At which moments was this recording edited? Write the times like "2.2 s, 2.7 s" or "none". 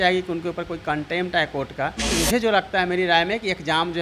2.2 s